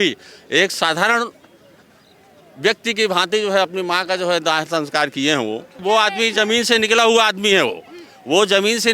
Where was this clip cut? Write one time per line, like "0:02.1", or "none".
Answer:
0:05.8